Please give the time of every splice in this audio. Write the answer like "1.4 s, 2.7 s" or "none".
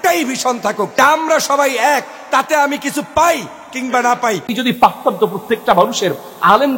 0.9 s, 4.5 s